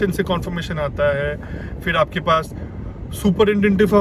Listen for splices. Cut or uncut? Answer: uncut